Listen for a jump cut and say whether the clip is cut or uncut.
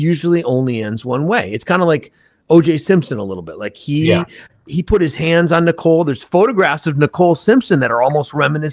cut